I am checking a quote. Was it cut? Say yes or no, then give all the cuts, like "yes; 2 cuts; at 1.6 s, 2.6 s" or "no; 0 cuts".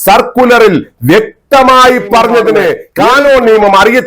yes; 1 cut; at 2.8 s